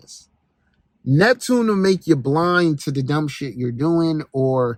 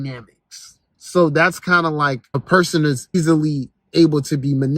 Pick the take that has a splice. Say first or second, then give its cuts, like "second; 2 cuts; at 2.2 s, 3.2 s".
second; 2 cuts; at 2.3 s, 3.2 s